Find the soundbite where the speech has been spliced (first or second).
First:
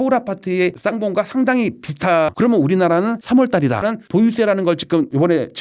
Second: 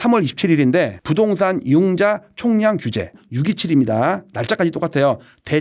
first